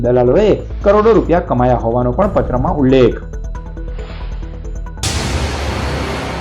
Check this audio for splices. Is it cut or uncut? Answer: cut